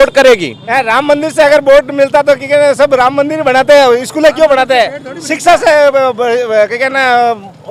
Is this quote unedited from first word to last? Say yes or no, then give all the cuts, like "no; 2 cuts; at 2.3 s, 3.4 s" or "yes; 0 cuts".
yes; 0 cuts